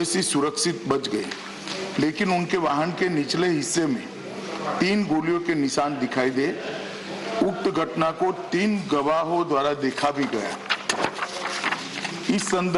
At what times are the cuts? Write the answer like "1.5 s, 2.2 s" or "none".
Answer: none